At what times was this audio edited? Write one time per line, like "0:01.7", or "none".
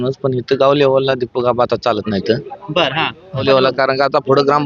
0:03.4